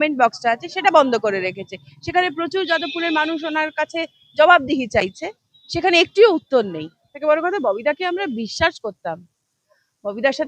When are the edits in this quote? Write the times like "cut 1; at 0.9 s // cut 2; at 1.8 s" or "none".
cut 1; at 7.1 s